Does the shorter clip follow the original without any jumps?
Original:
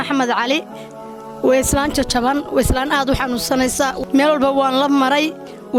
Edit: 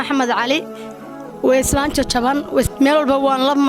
no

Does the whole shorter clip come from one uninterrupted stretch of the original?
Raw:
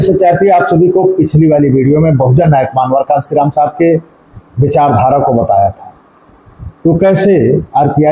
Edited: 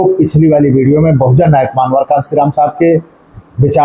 yes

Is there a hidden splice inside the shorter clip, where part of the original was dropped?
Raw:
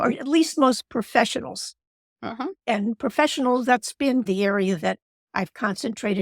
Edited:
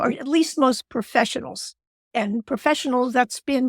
yes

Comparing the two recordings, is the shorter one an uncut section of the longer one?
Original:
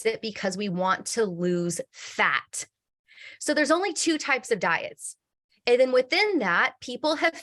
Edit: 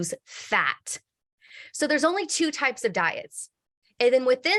yes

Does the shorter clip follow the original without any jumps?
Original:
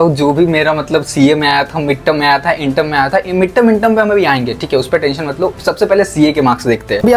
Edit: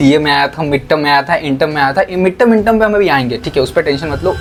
yes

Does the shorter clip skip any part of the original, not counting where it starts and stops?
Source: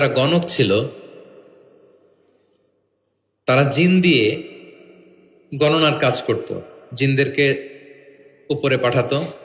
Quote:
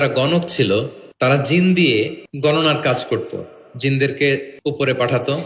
yes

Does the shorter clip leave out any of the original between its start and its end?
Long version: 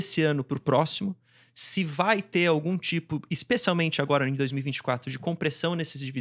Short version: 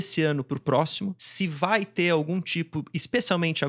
yes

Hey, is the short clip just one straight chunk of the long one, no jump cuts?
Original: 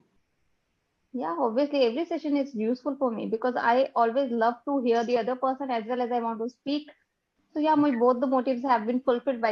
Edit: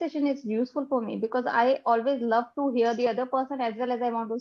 yes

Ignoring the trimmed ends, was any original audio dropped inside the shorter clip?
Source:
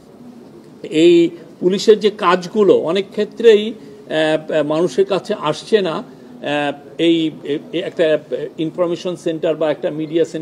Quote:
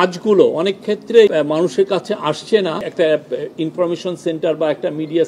yes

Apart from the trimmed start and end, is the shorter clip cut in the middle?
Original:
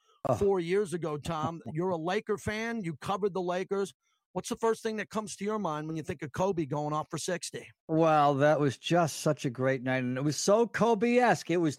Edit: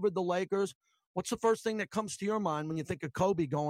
no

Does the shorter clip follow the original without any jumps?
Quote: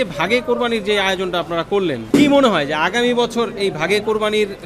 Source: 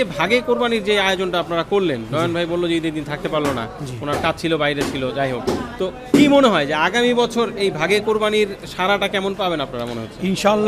no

